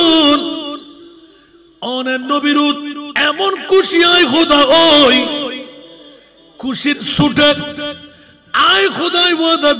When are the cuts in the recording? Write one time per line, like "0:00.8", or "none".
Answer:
0:03.0